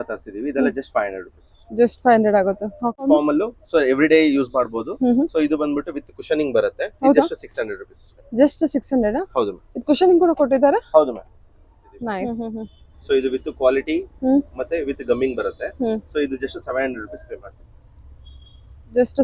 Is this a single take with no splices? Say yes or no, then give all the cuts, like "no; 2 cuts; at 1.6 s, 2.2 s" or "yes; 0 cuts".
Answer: no; 2 cuts; at 3.1 s, 12.3 s